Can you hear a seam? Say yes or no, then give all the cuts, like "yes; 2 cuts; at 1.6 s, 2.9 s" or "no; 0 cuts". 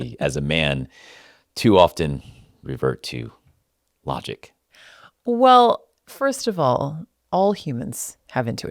no; 0 cuts